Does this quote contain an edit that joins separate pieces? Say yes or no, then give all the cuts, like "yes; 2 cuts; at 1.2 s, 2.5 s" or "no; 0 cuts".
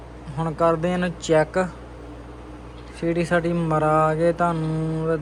no; 0 cuts